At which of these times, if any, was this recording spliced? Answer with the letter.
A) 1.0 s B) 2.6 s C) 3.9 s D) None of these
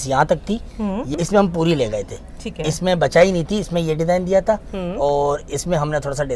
A